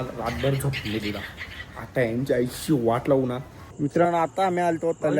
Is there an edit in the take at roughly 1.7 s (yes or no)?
no